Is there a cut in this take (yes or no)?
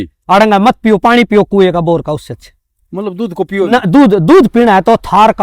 no